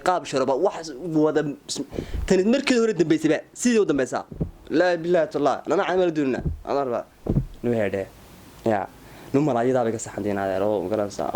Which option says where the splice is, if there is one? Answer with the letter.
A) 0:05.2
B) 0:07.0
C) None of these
C